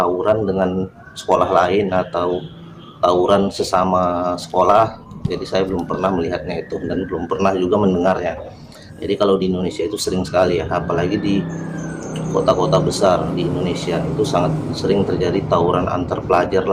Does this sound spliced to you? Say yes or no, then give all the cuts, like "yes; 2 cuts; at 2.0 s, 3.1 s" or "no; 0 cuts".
no; 0 cuts